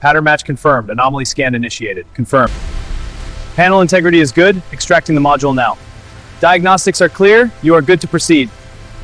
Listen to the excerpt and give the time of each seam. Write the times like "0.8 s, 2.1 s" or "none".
2.5 s